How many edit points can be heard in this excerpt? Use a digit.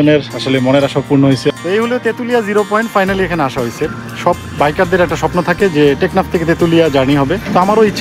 1